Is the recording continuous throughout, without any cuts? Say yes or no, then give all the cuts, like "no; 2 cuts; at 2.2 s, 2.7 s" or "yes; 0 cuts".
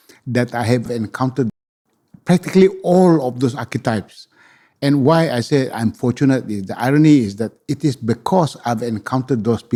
yes; 0 cuts